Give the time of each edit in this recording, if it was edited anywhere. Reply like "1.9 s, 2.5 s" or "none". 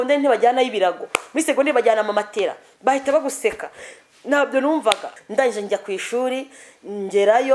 5.1 s